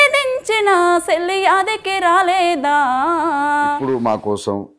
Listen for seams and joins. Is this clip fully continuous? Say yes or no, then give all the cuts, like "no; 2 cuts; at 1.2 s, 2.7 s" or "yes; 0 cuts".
no; 1 cut; at 3.8 s